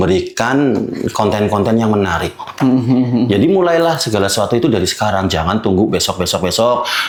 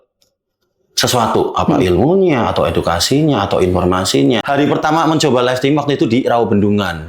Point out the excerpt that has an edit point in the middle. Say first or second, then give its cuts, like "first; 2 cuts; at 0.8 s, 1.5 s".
second; 1 cut; at 4.4 s